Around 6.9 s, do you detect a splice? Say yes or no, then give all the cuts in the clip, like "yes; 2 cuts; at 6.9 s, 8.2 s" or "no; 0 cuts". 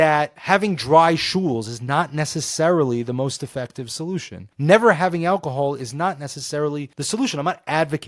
yes; 2 cuts; at 4.4 s, 6.9 s